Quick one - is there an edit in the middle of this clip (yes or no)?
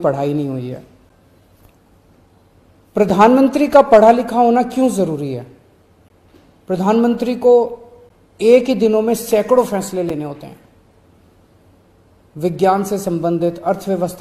no